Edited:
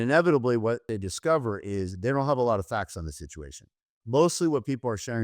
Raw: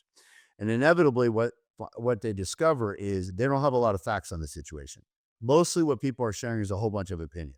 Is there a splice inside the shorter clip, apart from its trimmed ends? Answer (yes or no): yes